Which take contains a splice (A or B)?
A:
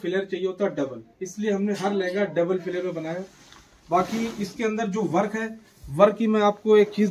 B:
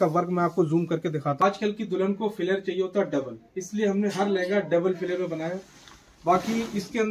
B